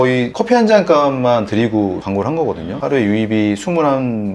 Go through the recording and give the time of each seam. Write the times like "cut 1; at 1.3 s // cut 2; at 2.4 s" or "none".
cut 1; at 2.8 s